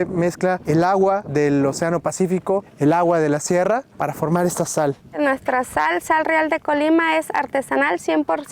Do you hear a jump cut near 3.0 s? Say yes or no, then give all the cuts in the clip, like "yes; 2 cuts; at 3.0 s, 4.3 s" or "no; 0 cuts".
no; 2 cuts; at 1.1 s, 5.1 s